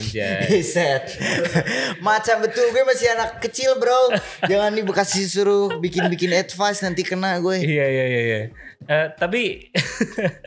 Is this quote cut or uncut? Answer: uncut